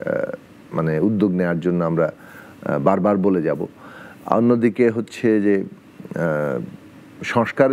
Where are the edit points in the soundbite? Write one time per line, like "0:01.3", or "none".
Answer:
none